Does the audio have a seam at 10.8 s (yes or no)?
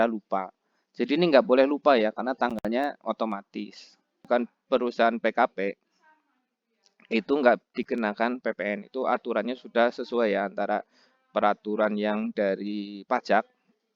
no